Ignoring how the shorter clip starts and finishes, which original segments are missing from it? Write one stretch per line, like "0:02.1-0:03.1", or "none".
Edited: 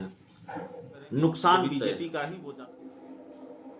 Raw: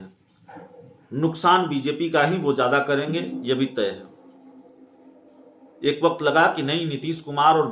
0:02.3-0:04.3